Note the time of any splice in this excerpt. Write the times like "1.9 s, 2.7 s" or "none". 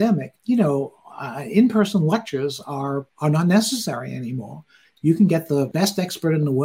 5.7 s